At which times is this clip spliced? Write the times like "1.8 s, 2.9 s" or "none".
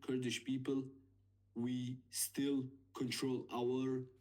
none